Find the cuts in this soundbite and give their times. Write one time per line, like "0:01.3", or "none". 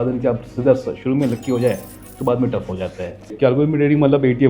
0:03.3